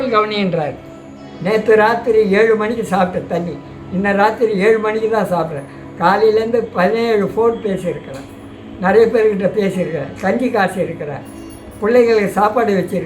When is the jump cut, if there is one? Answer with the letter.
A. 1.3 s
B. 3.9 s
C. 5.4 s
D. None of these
A